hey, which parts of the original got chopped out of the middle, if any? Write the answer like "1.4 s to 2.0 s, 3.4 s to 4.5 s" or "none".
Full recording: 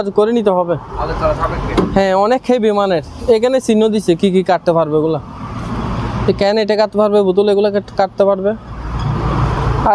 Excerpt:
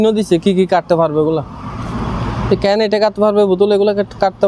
none